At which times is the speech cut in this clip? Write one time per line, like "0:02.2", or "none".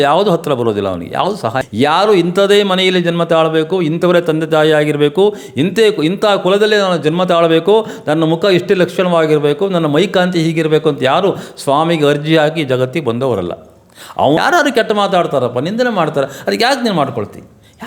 0:01.6
0:14.4